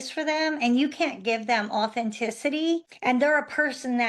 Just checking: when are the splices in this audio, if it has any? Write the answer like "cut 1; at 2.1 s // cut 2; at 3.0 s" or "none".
cut 1; at 2.9 s